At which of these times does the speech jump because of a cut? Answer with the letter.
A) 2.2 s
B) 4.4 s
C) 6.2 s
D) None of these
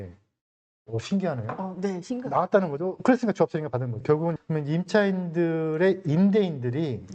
B